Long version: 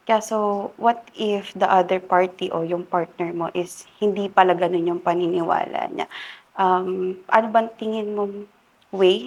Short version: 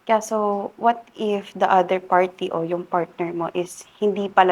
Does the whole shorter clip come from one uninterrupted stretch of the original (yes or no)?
yes